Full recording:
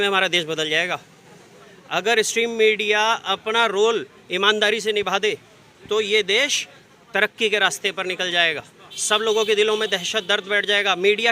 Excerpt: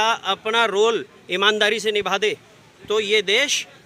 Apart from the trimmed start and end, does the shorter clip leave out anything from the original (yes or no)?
no